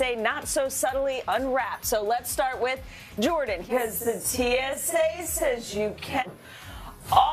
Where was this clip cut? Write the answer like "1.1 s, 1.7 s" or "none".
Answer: none